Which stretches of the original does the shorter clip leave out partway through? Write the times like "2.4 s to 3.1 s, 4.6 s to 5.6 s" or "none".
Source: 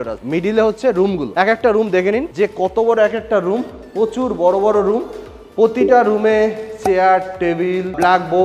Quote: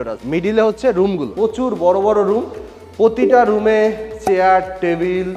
1.2 s to 3.8 s